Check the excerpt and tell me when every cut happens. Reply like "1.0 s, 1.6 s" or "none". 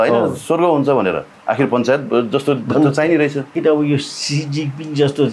1.3 s, 3.6 s